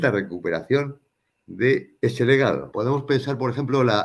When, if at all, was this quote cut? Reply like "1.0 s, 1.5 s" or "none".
1.9 s, 2.7 s